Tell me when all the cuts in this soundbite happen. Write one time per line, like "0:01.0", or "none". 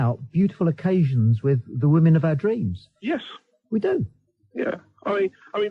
none